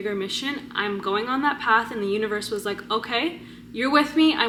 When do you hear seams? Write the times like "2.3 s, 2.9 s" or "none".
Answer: none